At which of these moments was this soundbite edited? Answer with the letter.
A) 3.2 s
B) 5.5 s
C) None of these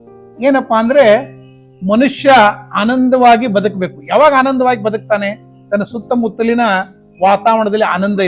C